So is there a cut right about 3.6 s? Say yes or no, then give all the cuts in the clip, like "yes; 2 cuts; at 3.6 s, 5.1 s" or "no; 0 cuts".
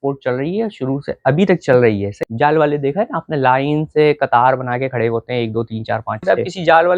no; 2 cuts; at 2.1 s, 6.2 s